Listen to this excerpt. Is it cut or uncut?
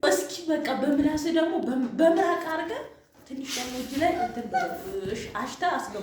uncut